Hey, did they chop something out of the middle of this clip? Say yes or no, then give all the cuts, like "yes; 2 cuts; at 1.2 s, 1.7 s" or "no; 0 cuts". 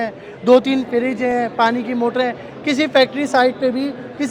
no; 0 cuts